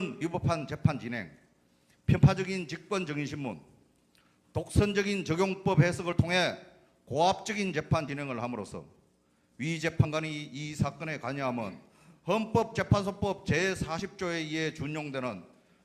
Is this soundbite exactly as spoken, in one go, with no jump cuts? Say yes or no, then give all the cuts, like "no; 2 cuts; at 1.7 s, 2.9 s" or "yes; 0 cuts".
no; 1 cut; at 8.0 s